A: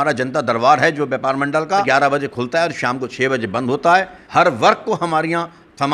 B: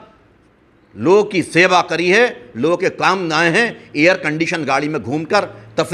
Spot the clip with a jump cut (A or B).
A